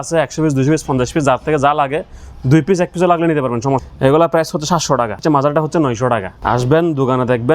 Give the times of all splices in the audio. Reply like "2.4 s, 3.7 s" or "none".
3.9 s, 5.2 s, 6.3 s